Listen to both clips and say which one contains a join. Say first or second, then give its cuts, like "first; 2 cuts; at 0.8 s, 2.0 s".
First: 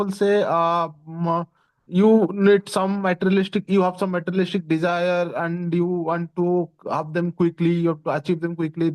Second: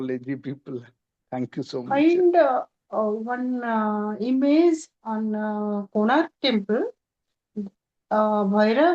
second; 1 cut; at 1.8 s